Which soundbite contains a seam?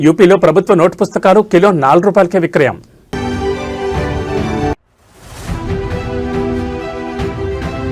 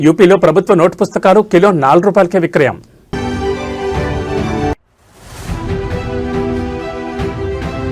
first; 2 cuts; at 3.1 s, 4.7 s

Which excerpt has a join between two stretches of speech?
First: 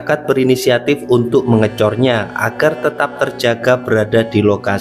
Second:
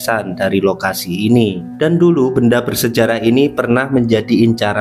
second; 1 cut; at 1.6 s

